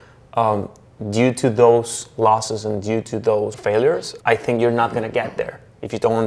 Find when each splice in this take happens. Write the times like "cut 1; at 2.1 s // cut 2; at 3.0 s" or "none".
cut 1; at 3.8 s